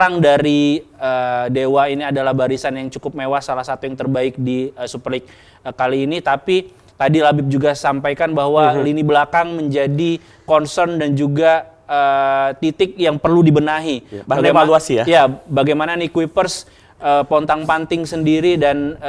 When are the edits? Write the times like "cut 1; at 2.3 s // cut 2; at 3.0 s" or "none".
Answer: none